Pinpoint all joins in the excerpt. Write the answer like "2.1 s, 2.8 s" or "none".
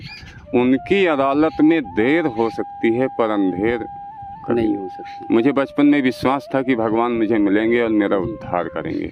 none